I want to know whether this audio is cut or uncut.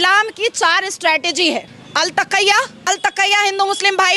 cut